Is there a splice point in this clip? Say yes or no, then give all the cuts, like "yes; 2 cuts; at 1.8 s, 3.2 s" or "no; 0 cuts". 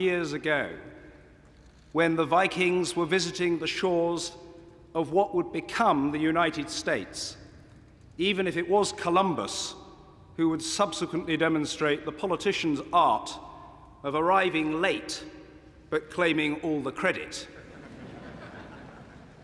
no; 0 cuts